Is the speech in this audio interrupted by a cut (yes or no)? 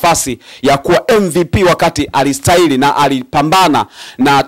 no